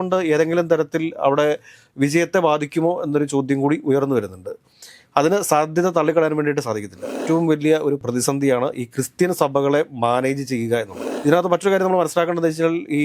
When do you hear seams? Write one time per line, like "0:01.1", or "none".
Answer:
0:07.2
0:08.0
0:11.0